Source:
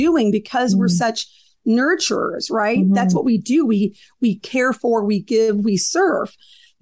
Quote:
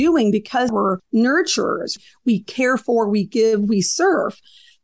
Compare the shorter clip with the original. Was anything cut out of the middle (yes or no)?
yes